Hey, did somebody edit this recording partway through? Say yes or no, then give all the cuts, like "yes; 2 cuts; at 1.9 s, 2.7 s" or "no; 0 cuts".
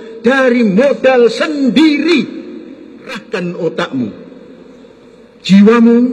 yes; 1 cut; at 3.2 s